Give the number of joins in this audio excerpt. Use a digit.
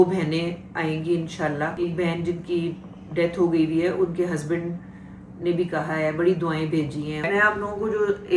2